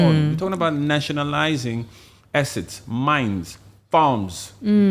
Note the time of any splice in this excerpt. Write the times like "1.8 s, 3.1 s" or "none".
none